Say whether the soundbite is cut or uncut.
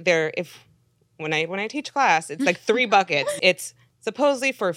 cut